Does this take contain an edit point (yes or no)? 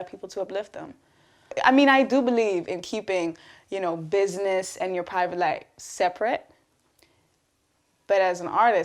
yes